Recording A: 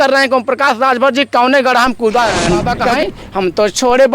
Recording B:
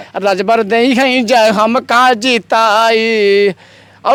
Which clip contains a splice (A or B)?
A